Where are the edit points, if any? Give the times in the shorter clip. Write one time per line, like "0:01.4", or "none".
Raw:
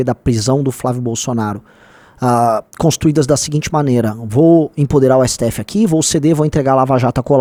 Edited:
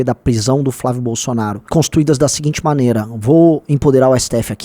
0:01.6